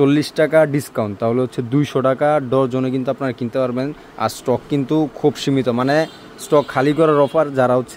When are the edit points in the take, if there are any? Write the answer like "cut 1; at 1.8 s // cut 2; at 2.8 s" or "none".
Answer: none